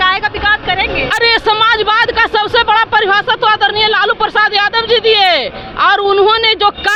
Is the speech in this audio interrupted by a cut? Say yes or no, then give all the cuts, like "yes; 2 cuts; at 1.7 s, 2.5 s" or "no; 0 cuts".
no; 0 cuts